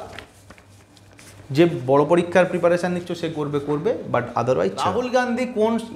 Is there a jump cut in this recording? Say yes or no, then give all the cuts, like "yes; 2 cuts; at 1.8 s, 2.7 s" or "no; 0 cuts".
yes; 1 cut; at 4.9 s